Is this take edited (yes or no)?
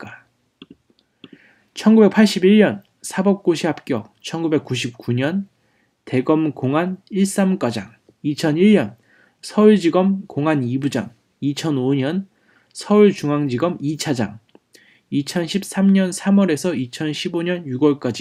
no